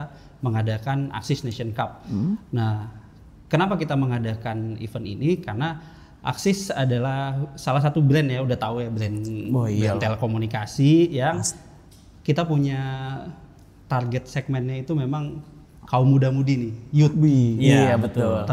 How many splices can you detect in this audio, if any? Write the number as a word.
one